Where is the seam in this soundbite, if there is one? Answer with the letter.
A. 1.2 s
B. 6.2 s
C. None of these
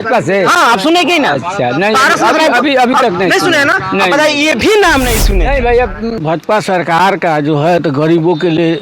B